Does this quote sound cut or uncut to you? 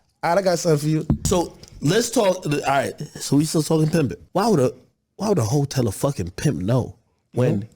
cut